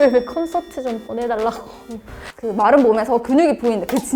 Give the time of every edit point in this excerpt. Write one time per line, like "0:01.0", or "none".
0:02.3